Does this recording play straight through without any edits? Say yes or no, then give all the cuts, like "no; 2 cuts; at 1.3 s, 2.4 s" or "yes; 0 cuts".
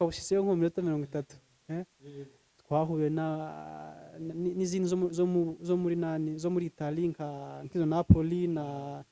yes; 0 cuts